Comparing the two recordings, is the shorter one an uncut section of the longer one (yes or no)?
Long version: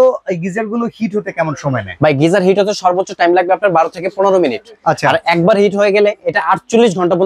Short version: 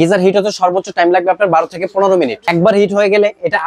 no